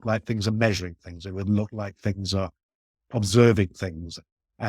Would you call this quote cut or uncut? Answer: cut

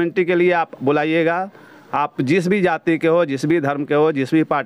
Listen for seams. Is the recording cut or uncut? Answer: uncut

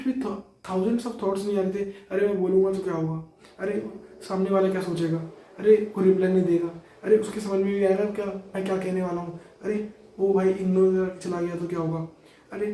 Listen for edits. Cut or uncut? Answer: uncut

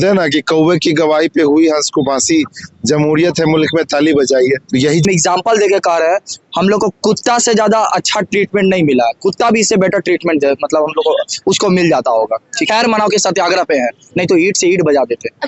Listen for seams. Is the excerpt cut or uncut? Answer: cut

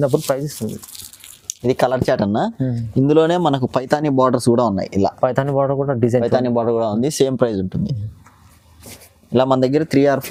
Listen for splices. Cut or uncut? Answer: uncut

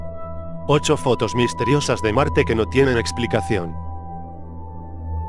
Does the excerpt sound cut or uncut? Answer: uncut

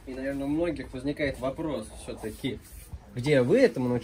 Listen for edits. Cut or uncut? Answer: uncut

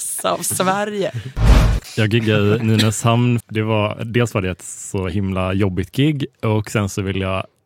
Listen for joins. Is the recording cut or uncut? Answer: cut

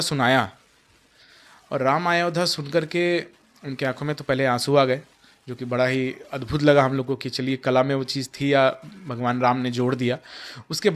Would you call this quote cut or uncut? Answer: uncut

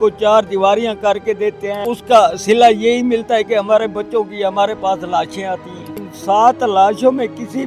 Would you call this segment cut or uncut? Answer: cut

